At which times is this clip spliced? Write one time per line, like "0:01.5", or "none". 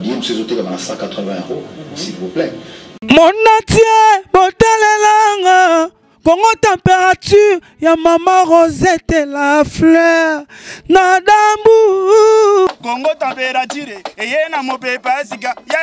0:03.0

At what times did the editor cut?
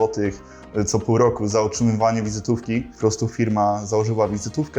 0:02.9

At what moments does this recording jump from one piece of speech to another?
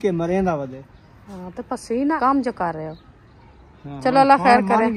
0:02.2

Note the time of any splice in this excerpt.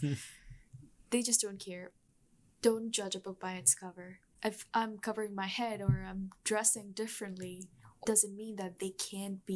0:01.9
0:04.3
0:08.0

